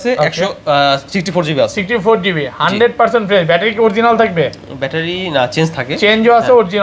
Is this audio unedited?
yes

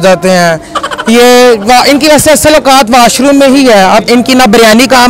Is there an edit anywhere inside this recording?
yes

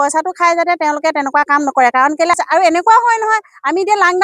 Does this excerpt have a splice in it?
yes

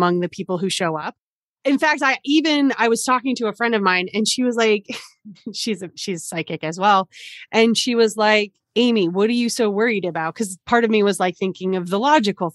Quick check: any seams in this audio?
yes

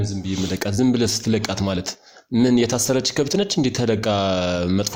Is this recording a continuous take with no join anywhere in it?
yes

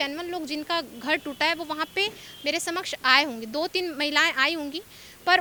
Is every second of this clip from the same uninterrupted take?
yes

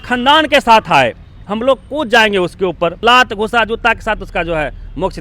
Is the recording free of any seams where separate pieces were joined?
no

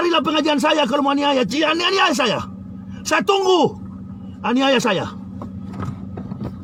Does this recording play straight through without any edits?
yes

